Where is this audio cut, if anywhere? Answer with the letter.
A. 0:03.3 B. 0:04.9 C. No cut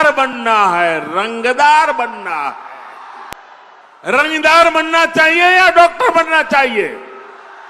A